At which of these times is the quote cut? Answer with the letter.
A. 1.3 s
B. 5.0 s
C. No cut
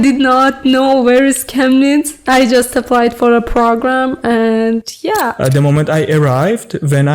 B